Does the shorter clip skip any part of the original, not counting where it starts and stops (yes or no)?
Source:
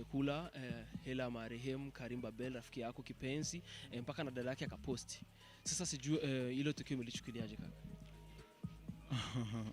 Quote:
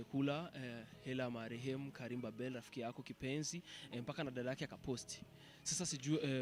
no